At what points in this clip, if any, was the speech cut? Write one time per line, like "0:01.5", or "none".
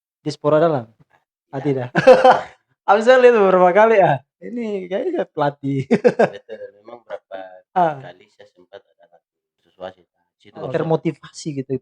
0:09.6